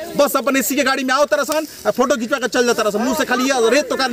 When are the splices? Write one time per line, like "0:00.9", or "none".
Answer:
none